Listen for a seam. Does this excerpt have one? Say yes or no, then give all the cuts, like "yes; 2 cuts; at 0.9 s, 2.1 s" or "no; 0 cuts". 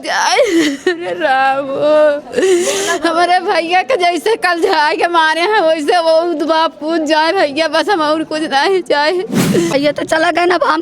yes; 1 cut; at 9.7 s